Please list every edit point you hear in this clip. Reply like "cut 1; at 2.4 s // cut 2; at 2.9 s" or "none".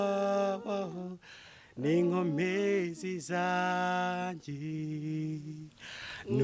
none